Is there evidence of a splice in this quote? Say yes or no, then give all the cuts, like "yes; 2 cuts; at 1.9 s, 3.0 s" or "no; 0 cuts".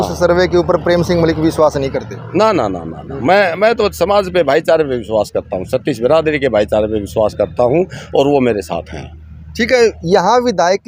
no; 0 cuts